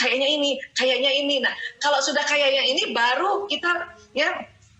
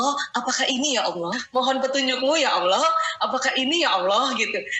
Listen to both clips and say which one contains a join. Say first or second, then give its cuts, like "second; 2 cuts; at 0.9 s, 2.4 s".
second; 1 cut; at 1.4 s